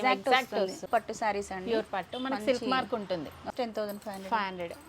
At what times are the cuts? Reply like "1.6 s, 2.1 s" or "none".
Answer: 0.9 s, 3.5 s